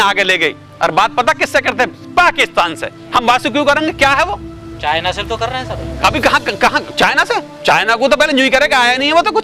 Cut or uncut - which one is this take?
uncut